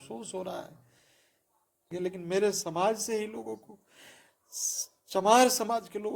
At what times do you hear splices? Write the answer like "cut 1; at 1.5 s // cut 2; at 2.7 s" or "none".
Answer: cut 1; at 1.8 s